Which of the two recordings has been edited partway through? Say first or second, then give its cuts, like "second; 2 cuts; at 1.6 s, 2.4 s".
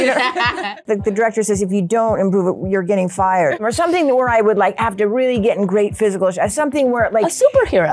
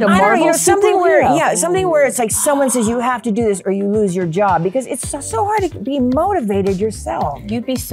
first; 2 cuts; at 0.8 s, 3.6 s